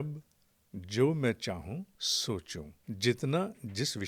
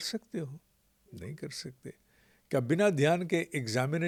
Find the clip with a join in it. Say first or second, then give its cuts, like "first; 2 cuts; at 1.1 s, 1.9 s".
first; 2 cuts; at 2.0 s, 2.7 s